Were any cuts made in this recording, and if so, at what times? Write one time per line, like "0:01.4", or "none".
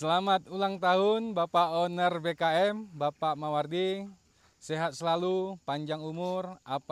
none

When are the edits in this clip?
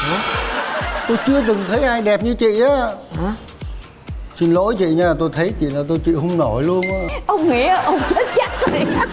0:07.1

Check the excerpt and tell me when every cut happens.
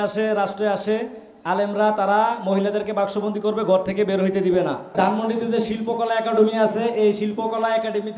0:04.9

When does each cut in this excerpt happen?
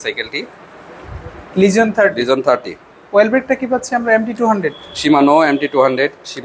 none

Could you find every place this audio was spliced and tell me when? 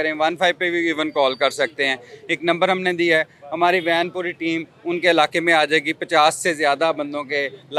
none

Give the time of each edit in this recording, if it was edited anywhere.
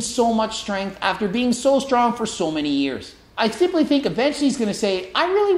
0:03.2

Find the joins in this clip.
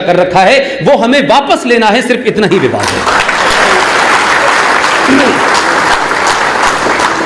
none

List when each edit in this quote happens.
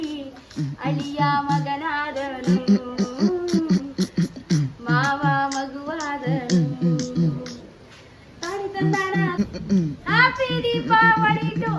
0:09.3

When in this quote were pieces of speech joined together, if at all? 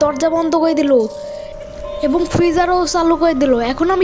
none

